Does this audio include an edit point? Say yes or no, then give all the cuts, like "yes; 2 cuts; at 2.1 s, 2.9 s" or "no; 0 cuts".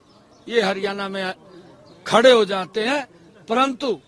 no; 0 cuts